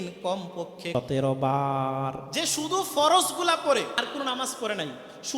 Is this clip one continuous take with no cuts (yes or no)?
no